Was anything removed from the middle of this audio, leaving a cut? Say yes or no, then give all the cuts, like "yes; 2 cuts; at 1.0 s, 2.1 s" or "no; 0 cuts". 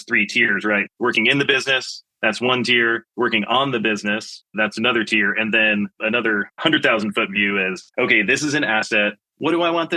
no; 0 cuts